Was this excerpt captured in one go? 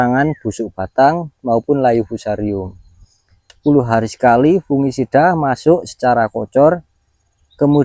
no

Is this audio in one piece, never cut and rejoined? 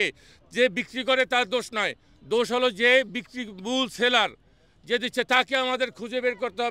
yes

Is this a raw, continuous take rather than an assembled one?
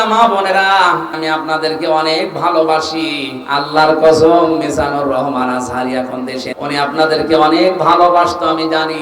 no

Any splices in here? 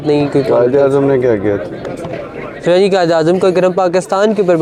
no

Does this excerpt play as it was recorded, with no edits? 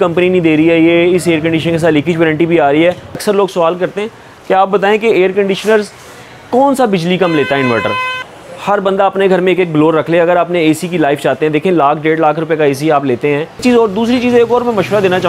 no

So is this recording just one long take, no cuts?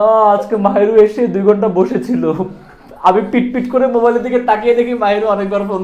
yes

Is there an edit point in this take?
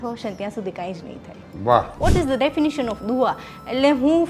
yes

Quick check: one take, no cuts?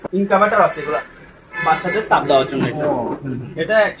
yes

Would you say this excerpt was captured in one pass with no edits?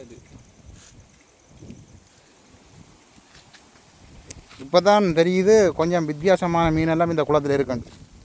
yes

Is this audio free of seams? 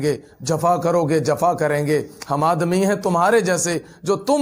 yes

